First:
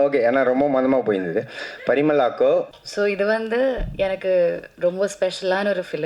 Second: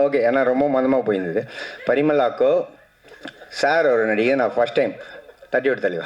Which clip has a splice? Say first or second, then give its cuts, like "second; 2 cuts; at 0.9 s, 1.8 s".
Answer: first; 1 cut; at 2.8 s